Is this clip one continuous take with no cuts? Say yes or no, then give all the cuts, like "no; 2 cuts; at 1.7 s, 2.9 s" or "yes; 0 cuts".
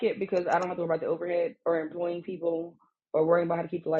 yes; 0 cuts